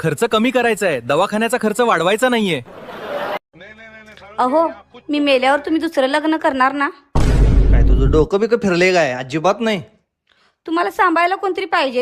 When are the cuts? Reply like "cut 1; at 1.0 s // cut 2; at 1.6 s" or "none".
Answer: cut 1; at 3.5 s